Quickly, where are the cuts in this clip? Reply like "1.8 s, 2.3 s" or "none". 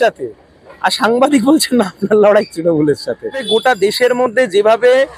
3.4 s